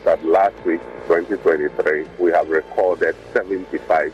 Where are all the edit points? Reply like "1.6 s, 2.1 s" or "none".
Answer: 2.1 s, 3.2 s